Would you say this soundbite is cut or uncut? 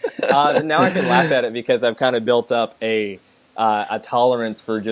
uncut